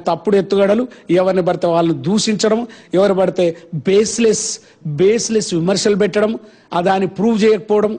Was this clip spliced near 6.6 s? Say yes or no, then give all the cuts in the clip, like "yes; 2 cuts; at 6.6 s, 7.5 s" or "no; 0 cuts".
no; 0 cuts